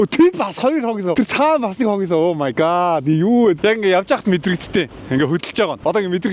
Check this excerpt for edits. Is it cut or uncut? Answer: cut